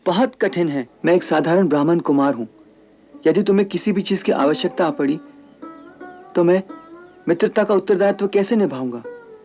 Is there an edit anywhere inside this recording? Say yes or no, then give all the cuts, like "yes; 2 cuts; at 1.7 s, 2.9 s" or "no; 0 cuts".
yes; 1 cut; at 0.9 s